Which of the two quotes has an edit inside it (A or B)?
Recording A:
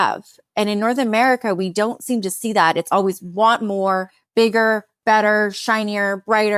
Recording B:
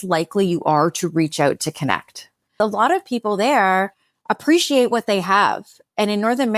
B